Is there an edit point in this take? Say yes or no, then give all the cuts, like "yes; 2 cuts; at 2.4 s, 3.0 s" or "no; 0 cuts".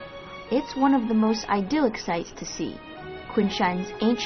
no; 0 cuts